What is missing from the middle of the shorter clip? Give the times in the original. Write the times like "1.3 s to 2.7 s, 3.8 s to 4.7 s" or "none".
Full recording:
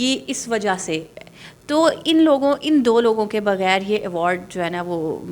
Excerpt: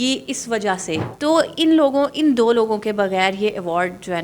1.1 s to 1.6 s